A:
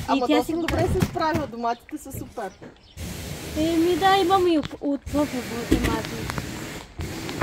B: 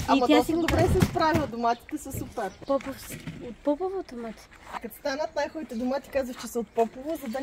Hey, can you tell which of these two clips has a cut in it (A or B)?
B